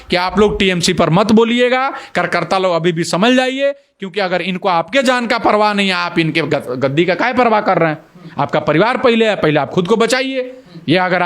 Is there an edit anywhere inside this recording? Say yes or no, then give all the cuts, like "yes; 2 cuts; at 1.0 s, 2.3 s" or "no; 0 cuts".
no; 0 cuts